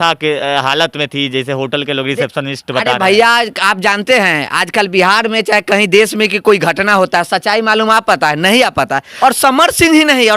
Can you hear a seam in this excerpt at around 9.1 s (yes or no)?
yes